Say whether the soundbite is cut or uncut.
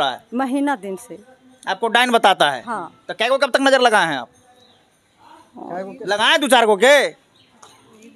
uncut